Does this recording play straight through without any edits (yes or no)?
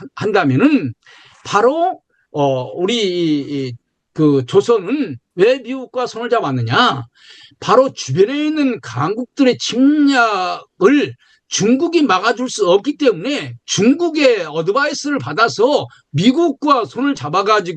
yes